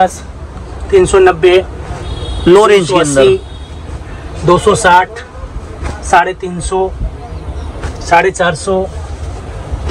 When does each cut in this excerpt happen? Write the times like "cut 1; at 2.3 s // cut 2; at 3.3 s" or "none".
none